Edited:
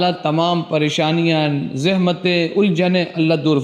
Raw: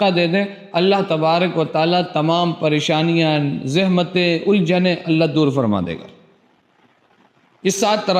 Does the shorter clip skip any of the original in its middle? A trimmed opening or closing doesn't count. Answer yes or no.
no